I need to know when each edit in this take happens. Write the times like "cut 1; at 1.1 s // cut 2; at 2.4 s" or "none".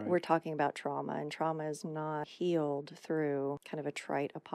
cut 1; at 2.3 s // cut 2; at 3.6 s